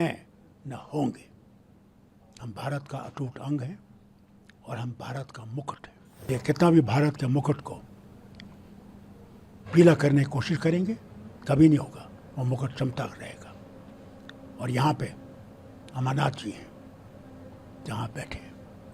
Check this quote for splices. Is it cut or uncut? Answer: cut